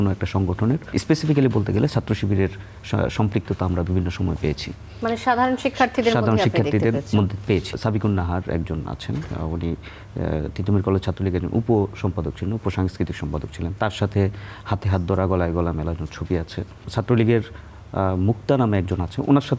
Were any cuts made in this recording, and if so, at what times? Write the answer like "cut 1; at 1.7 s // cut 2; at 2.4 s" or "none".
cut 1; at 0.9 s // cut 2; at 7.7 s // cut 3; at 16.9 s